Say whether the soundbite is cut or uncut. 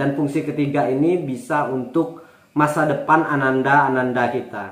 uncut